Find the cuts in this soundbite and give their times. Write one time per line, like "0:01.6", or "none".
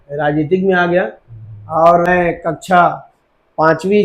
0:02.1